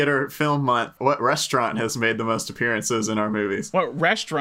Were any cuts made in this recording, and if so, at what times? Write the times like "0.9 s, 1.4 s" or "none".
0.9 s, 3.7 s